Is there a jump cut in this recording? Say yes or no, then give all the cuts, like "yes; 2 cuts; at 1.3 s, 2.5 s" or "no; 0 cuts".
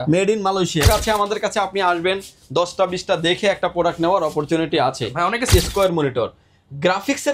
yes; 2 cuts; at 0.9 s, 5.5 s